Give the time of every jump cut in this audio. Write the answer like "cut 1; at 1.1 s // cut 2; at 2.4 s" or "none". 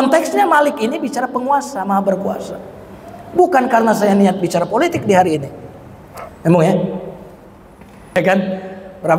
cut 1; at 8.2 s